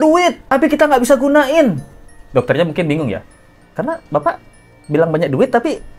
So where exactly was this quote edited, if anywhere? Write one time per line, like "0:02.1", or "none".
none